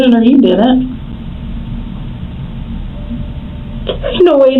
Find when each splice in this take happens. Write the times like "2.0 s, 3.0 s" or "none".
none